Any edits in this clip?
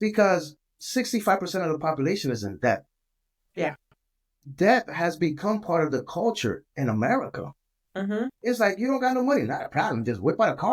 no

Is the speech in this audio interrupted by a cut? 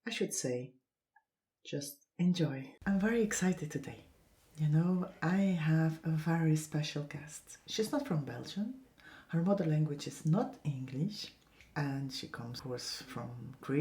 yes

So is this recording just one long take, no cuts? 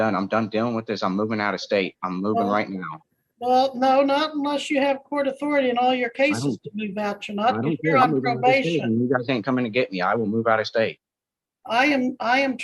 yes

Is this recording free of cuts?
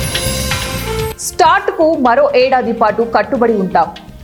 yes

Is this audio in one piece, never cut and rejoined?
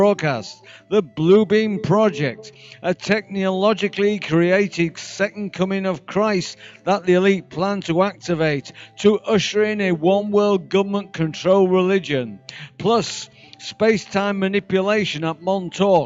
no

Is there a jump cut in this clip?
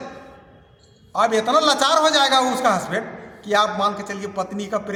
no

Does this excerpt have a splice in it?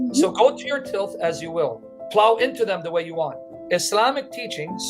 yes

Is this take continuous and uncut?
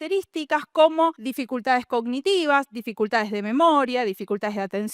no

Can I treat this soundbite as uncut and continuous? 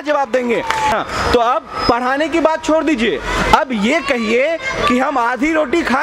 no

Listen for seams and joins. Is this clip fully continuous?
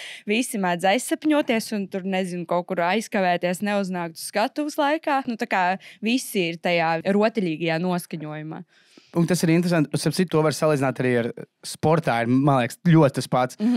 no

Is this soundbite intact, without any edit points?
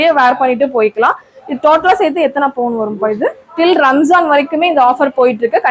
no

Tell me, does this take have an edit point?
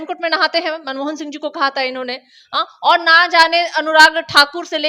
no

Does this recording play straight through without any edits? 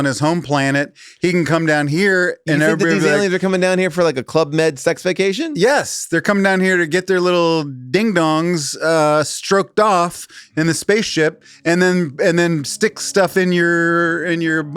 yes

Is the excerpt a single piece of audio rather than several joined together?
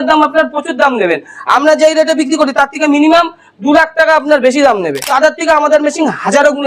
no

